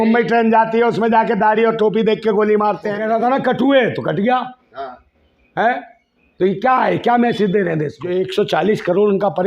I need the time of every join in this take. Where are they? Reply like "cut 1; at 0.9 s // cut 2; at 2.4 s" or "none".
cut 1; at 3.0 s // cut 2; at 8.0 s